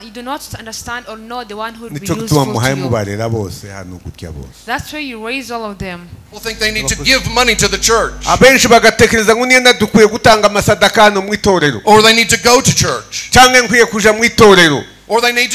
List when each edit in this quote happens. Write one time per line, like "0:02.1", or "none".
0:06.5